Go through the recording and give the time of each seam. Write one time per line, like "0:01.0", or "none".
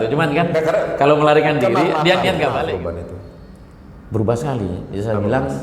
0:02.6